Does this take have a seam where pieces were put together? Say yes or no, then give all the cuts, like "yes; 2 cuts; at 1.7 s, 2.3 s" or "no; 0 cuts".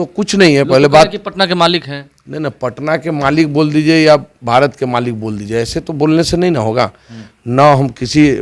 no; 0 cuts